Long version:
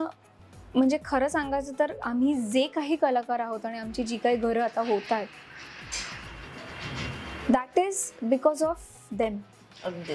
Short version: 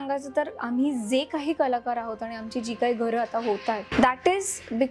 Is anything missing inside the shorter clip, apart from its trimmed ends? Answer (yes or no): yes